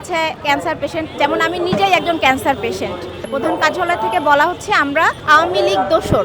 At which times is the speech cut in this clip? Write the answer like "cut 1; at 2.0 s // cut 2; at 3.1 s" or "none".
cut 1; at 3.3 s // cut 2; at 5.2 s